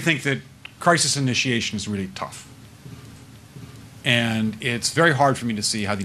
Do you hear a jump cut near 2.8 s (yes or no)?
yes